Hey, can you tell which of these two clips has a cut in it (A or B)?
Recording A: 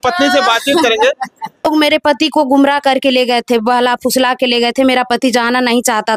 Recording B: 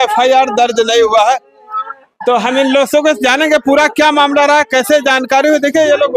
A